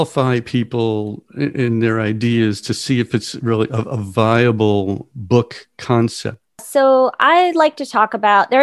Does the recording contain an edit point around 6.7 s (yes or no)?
yes